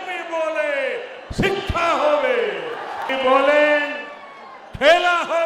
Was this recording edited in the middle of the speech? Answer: yes; 1 cut; at 3.1 s

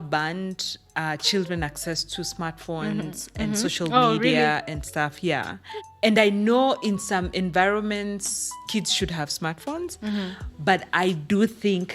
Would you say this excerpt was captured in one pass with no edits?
yes; 0 cuts

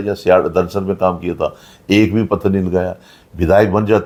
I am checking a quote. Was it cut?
no; 0 cuts

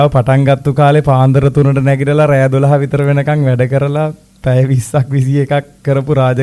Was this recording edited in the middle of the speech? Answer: no; 0 cuts

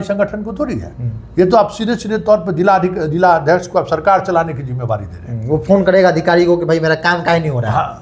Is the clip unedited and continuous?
yes; 0 cuts

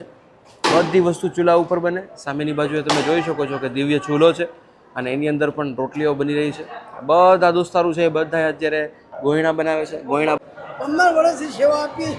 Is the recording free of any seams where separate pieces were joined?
no; 1 cut; at 10.4 s

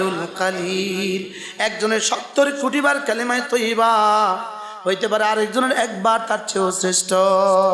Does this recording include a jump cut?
no; 0 cuts

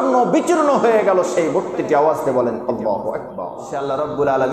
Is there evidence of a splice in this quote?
yes; 1 cut; at 3.6 s

